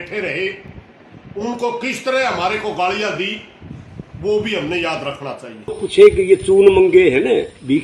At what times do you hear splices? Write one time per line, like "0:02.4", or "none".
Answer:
0:05.8